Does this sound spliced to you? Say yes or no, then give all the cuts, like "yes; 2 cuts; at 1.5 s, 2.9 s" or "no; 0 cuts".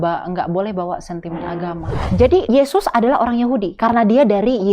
yes; 2 cuts; at 2.3 s, 3.7 s